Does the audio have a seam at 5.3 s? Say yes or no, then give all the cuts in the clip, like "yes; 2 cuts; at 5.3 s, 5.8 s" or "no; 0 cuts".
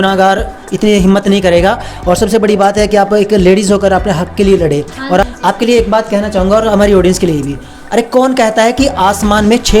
yes; 1 cut; at 5.3 s